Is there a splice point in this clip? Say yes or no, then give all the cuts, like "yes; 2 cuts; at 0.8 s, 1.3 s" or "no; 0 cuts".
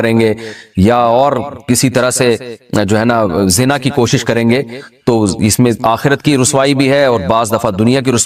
no; 0 cuts